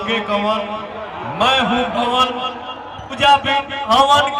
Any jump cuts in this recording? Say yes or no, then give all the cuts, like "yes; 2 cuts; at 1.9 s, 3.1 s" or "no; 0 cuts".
no; 0 cuts